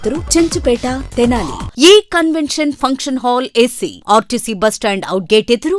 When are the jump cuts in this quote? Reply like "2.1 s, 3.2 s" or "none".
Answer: 1.6 s